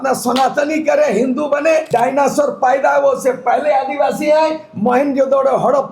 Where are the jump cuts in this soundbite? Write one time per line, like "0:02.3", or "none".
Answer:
0:01.9